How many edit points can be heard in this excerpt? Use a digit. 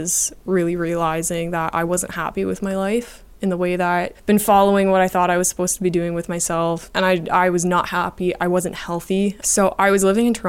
3